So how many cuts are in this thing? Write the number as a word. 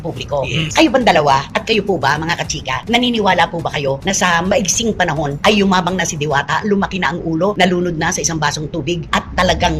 zero